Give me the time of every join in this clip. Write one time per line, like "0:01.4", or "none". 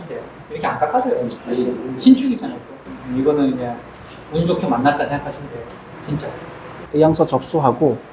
0:06.8